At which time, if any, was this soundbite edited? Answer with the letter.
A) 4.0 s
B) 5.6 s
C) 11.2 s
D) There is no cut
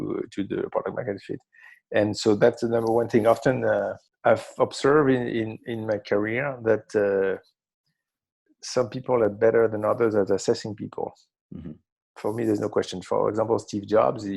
A